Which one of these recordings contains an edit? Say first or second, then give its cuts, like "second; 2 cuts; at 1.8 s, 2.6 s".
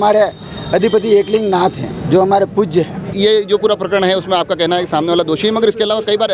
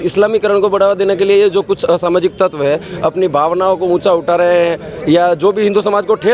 first; 1 cut; at 3.1 s